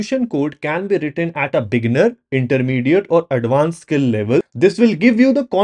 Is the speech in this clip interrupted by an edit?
yes; 1 cut; at 4.5 s

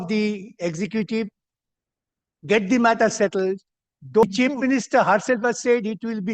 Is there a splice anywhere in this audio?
yes; 1 cut; at 4.2 s

